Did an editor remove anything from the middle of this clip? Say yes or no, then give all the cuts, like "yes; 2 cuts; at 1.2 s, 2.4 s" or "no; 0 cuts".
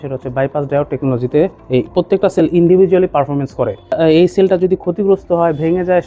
yes; 1 cut; at 3.9 s